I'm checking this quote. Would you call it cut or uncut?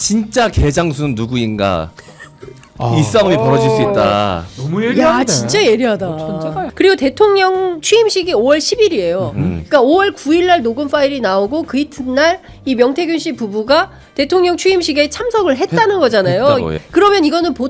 cut